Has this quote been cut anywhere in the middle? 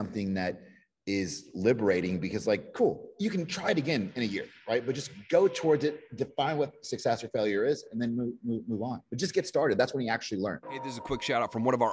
yes; 1 cut; at 10.8 s

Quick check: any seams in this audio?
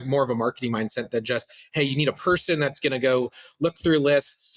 no; 0 cuts

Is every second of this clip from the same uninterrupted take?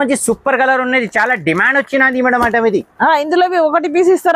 yes; 0 cuts

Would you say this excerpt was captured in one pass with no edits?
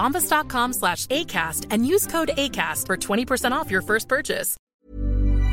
no; 1 cut; at 4.5 s

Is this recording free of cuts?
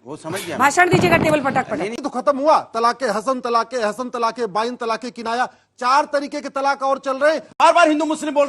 no; 2 cuts; at 2.0 s, 7.6 s

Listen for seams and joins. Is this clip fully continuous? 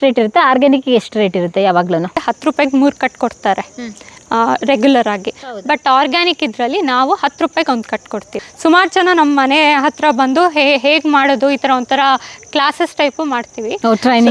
no; 2 cuts; at 2.2 s, 8.4 s

